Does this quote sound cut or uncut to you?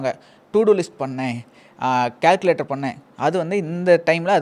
uncut